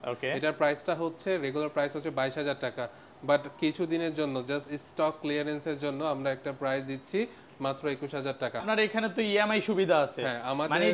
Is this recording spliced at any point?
yes; 1 cut; at 8.6 s

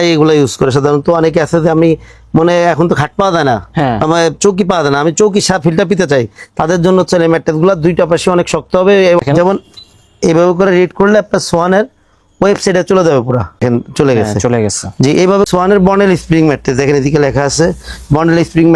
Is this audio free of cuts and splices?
no; 3 cuts; at 9.2 s, 13.6 s, 15.5 s

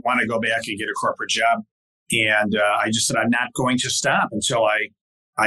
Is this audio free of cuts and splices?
yes; 0 cuts

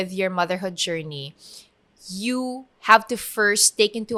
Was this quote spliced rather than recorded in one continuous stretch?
no; 0 cuts

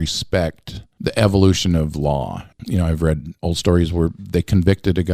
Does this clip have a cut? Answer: yes; 2 cuts; at 2.5 s, 3.3 s

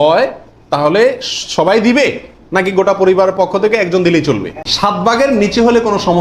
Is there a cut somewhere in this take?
yes; 1 cut; at 4.7 s

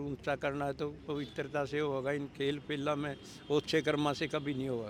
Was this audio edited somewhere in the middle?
no; 0 cuts

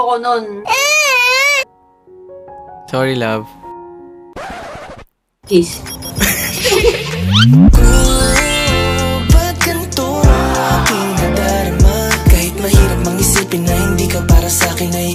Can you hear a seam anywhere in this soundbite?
no; 0 cuts

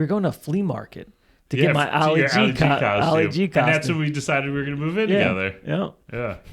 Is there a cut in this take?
no; 0 cuts

